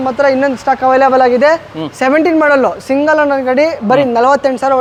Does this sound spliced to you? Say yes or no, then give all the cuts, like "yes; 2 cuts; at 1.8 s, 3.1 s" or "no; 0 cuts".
no; 0 cuts